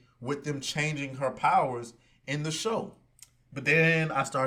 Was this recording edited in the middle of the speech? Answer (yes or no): no